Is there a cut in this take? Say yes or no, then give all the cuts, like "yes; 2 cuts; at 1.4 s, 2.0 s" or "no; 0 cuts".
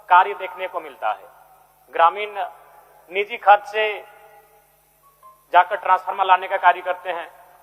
no; 0 cuts